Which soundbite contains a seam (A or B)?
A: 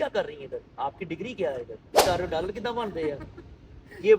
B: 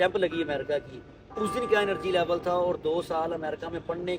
A